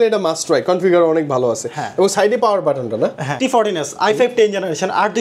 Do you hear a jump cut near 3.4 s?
yes; 1 cut; at 3.4 s

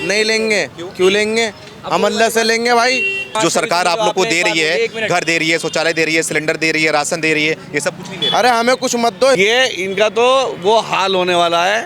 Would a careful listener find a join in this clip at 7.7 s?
no; 2 cuts; at 3.3 s, 9.4 s

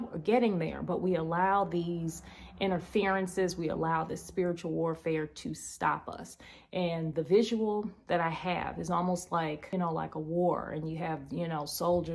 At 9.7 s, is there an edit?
yes; 1 cut; at 9.7 s

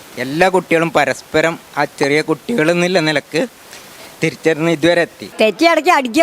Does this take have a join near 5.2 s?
yes; 1 cut; at 5.2 s

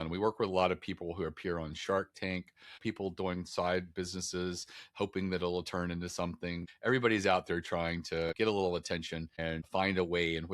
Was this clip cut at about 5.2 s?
no; 4 cuts; at 2.8 s, 6.7 s, 8.3 s, 9.5 s

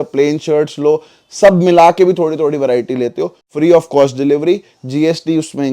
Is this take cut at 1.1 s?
no; 1 cut; at 3.4 s

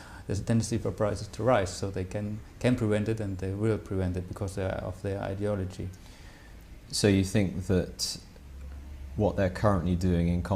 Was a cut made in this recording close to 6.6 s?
no; 1 cut; at 4.3 s

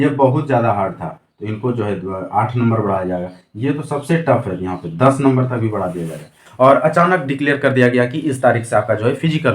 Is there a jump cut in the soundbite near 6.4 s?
yes; 1 cut; at 6.4 s

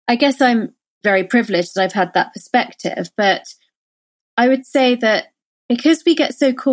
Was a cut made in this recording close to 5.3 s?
no; 1 cut; at 1.0 s

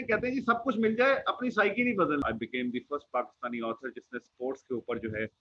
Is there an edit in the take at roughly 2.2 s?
yes; 1 cut; at 2.2 s

